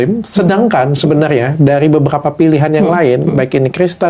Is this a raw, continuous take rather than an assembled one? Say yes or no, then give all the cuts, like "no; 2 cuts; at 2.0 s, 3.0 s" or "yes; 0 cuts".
yes; 0 cuts